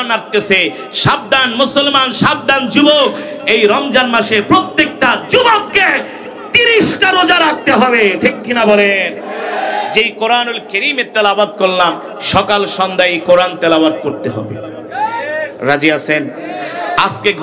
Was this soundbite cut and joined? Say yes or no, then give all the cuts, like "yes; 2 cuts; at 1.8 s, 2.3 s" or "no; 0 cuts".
no; 0 cuts